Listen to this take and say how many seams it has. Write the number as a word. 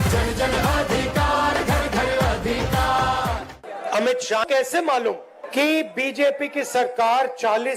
three